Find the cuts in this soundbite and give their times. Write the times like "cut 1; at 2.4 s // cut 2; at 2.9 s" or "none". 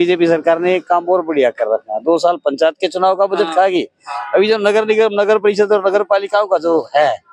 none